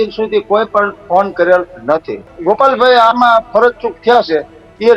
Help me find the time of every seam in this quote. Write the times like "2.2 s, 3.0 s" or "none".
2.3 s